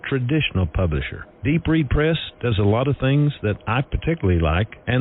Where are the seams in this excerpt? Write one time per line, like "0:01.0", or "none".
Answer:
0:03.9